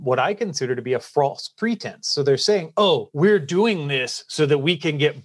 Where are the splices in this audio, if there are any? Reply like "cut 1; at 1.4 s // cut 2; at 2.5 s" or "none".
cut 1; at 3.1 s